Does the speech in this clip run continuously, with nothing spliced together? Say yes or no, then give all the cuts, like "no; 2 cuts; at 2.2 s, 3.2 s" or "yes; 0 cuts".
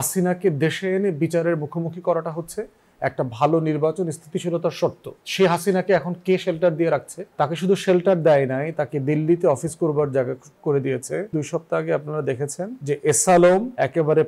no; 1 cut; at 11.3 s